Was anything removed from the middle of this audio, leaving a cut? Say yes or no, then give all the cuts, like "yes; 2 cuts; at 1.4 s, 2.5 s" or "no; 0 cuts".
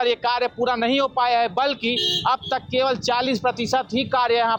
no; 0 cuts